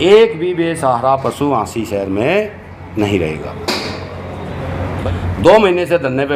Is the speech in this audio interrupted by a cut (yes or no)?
yes